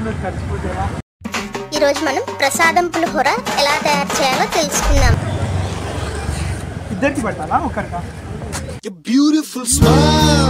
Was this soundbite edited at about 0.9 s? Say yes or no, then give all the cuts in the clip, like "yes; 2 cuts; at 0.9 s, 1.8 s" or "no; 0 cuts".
yes; 1 cut; at 0.9 s